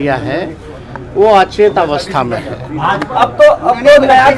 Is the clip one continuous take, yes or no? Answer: yes